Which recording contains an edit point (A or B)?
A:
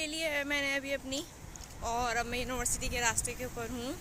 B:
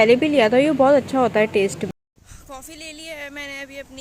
B